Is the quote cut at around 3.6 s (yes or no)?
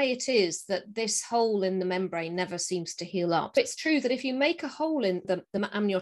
yes